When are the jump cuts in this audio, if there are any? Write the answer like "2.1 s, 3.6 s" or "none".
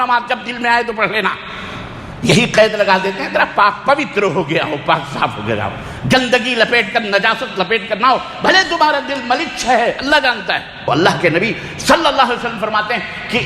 10.9 s